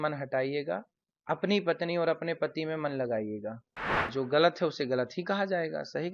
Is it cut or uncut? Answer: cut